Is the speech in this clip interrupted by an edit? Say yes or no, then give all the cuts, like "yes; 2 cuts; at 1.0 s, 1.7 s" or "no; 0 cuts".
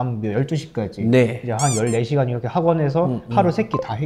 no; 0 cuts